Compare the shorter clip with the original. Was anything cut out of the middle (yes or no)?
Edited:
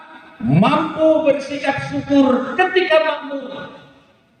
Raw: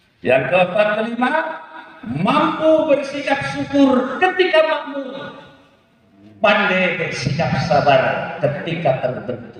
no